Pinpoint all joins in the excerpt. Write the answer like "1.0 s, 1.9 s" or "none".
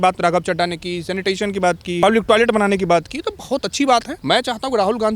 2.0 s, 4.1 s